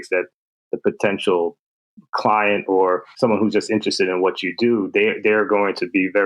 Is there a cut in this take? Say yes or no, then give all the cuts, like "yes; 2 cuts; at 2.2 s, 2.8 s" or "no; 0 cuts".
yes; 2 cuts; at 1.6 s, 3.1 s